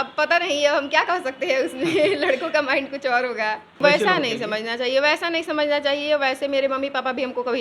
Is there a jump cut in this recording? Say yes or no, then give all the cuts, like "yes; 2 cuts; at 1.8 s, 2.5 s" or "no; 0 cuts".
yes; 1 cut; at 3.8 s